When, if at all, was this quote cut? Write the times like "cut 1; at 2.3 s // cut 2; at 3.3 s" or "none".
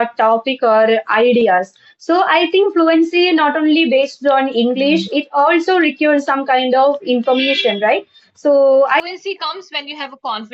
cut 1; at 9.0 s